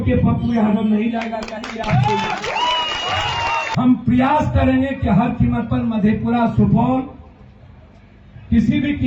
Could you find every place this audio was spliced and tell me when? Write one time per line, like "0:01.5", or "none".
0:03.7

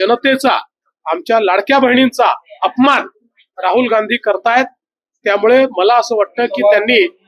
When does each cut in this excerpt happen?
none

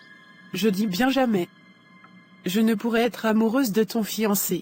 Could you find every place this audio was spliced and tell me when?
none

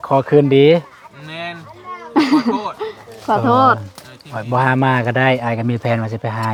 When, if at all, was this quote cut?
none

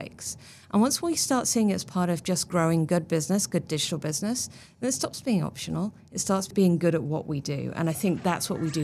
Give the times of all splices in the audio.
0:06.5

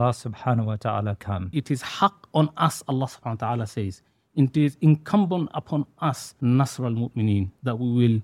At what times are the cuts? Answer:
0:01.5
0:06.3

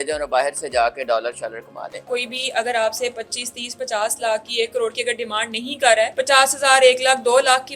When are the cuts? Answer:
0:02.1
0:06.1

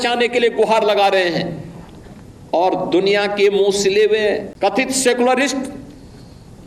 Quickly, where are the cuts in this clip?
0:04.5

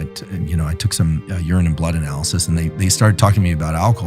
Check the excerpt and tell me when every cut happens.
none

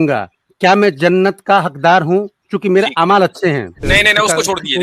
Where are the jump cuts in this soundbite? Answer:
0:03.7

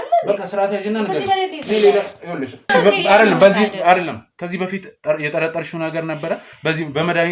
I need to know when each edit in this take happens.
0:02.7

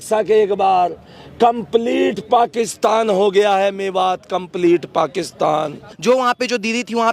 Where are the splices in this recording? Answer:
0:05.9

